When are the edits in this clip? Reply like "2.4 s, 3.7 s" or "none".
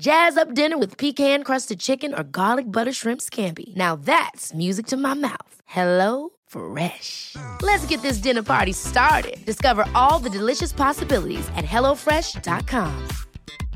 none